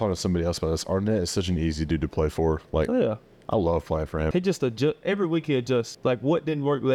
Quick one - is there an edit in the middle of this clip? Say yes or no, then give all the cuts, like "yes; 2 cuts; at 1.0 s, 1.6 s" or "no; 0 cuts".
yes; 2 cuts; at 4.3 s, 5.9 s